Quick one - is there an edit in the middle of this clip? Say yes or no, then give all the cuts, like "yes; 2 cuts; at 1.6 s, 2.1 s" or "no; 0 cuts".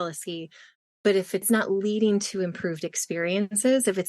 yes; 1 cut; at 1.6 s